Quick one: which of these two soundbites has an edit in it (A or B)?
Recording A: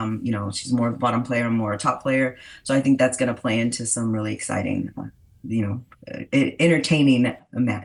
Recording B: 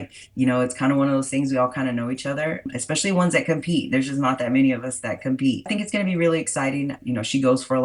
B